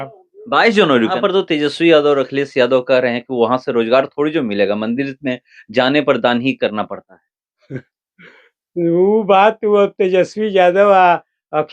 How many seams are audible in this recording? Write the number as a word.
one